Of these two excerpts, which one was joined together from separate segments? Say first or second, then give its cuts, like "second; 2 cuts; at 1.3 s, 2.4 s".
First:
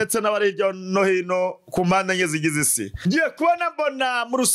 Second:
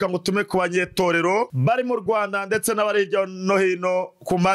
first; 1 cut; at 3.0 s